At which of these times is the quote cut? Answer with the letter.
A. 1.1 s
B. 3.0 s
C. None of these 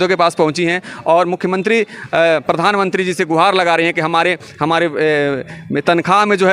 C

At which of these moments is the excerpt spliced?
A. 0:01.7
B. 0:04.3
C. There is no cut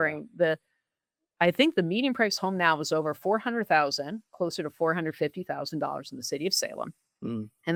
C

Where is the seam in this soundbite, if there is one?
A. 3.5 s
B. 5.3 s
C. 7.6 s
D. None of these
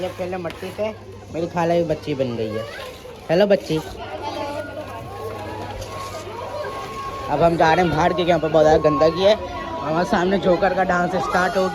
D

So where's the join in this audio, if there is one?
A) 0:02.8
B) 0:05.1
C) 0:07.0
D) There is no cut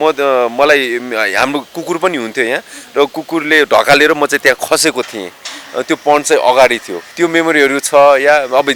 C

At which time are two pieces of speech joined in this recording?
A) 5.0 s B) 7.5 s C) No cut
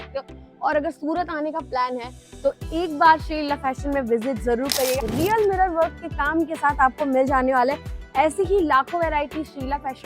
A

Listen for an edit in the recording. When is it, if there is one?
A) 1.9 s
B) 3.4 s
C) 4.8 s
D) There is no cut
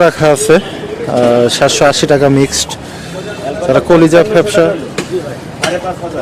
D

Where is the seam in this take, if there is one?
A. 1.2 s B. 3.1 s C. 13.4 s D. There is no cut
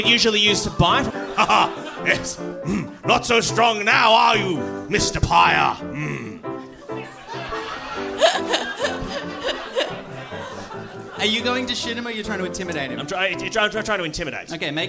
A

